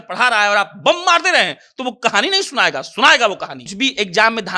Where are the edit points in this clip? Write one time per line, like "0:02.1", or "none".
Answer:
0:03.6

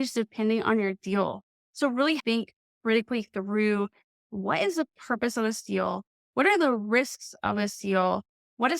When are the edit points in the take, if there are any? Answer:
0:02.2

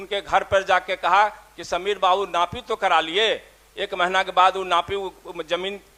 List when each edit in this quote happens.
none

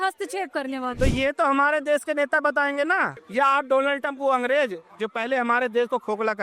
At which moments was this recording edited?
0:03.2

